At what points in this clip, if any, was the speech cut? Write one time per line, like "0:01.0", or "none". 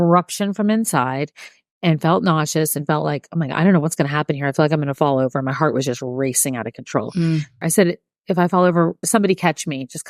0:07.6
0:09.0